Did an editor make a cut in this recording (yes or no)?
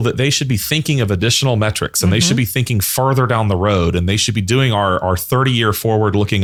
no